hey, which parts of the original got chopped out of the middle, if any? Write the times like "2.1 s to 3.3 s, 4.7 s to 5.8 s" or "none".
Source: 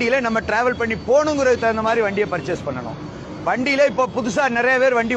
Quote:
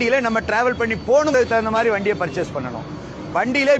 1.3 s to 1.4 s